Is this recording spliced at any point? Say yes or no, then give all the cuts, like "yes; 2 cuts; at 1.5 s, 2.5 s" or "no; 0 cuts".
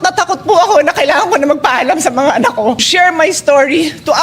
yes; 1 cut; at 2.9 s